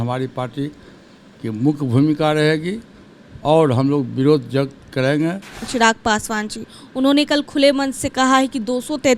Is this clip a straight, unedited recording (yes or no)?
no